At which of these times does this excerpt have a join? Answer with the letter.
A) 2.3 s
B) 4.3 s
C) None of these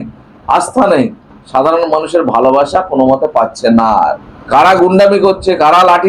B